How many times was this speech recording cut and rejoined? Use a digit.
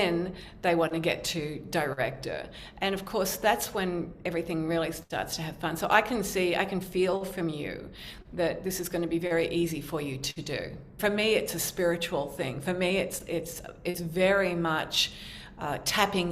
1